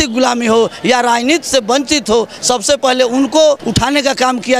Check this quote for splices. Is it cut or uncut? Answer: cut